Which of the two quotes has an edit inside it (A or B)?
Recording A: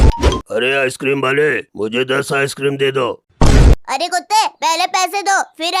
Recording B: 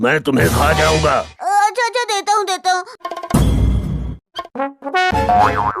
B